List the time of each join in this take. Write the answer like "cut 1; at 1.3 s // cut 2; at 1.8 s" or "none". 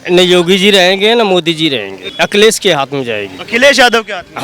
cut 1; at 2.0 s